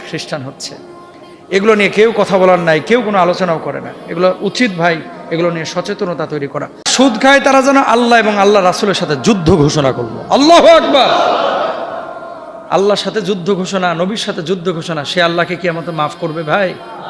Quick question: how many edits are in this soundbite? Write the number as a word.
one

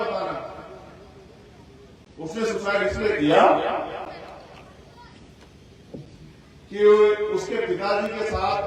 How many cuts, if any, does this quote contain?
zero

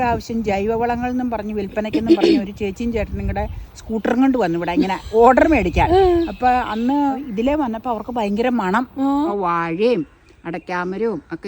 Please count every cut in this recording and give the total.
two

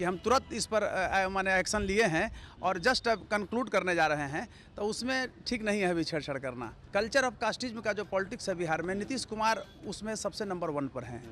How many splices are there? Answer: one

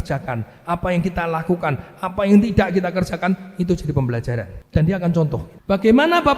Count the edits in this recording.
two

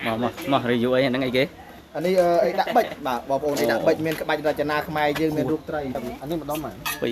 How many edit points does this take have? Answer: one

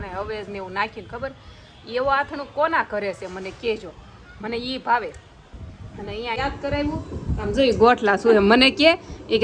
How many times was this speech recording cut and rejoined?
one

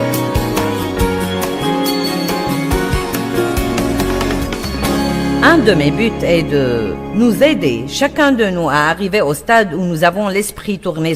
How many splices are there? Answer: one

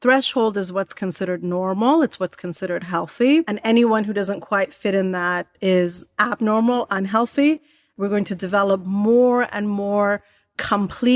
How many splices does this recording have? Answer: two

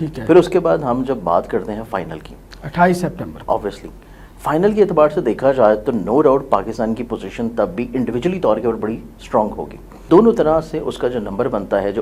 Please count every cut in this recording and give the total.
one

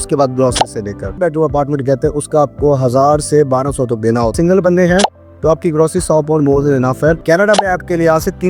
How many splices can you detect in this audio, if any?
three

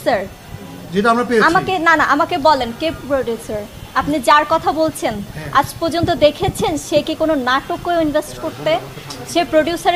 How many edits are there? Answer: zero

